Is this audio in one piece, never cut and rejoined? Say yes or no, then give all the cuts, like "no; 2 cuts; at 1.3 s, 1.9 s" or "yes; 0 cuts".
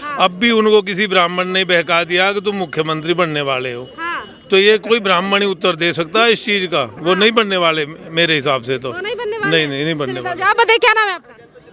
yes; 0 cuts